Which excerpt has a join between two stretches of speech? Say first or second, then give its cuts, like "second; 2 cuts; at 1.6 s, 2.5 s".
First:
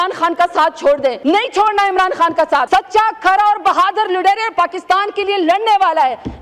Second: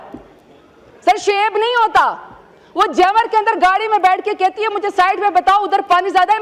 first; 2 cuts; at 1.2 s, 2.6 s